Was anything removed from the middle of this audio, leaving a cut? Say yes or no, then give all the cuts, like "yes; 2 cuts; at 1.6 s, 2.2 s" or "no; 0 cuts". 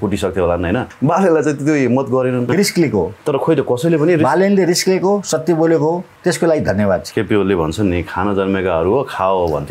yes; 4 cuts; at 0.9 s, 2.5 s, 6.1 s, 7.1 s